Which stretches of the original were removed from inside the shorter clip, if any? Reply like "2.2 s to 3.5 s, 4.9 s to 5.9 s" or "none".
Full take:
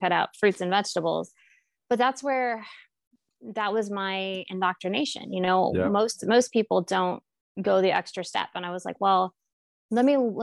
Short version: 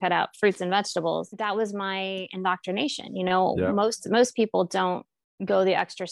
1.3 s to 3.5 s